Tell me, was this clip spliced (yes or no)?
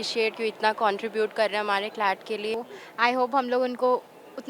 yes